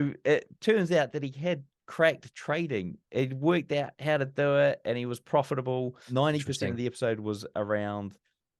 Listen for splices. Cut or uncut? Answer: cut